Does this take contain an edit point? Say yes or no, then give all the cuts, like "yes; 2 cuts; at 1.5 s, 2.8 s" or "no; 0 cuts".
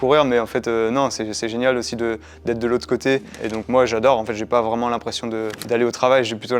yes; 2 cuts; at 3.4 s, 5.6 s